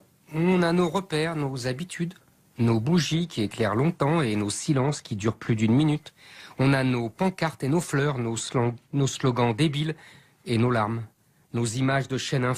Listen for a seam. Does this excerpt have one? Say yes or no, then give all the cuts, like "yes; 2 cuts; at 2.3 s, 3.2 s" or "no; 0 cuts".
no; 0 cuts